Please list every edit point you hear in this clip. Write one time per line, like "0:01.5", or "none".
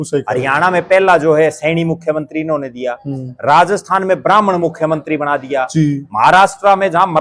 none